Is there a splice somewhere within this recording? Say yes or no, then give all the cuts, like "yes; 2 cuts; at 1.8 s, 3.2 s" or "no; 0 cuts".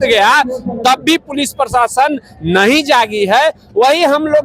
no; 0 cuts